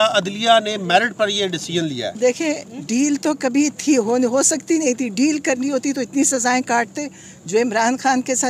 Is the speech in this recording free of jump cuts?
no; 1 cut; at 2.1 s

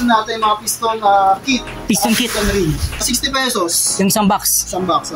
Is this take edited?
yes; 1 cut; at 3.0 s

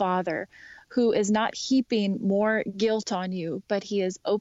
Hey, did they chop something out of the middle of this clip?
no; 0 cuts

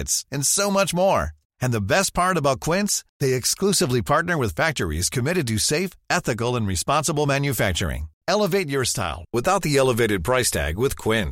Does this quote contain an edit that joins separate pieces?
no; 0 cuts

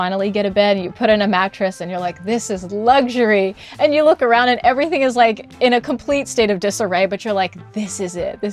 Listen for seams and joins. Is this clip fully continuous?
yes; 0 cuts

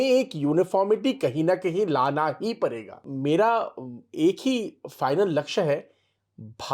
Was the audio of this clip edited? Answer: yes; 1 cut; at 3.1 s

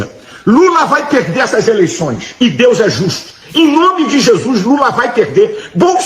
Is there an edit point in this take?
yes; 1 cut; at 2.2 s

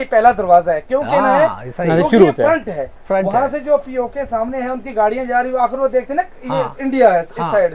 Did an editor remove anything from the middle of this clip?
no; 0 cuts

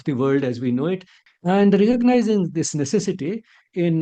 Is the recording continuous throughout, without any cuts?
no; 1 cut; at 1.2 s

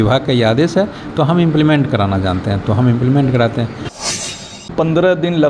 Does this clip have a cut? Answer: yes; 1 cut; at 4.3 s

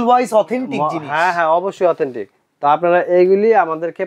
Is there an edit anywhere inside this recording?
no; 0 cuts

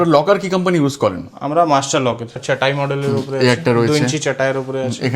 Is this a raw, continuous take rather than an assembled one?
no; 1 cut; at 2.3 s

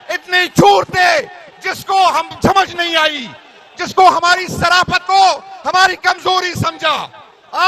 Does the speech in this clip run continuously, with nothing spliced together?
yes; 0 cuts

